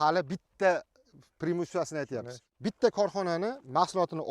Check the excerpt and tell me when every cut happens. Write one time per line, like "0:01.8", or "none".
0:02.5